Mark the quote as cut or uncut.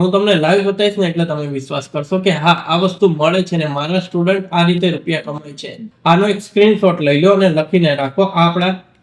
cut